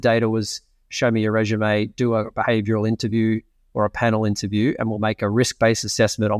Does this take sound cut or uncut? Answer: uncut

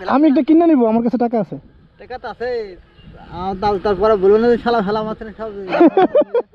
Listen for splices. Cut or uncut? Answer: uncut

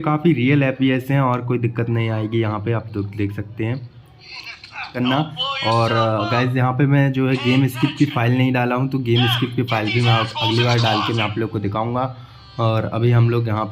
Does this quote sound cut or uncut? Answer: cut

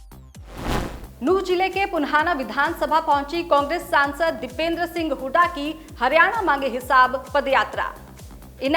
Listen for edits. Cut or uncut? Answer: uncut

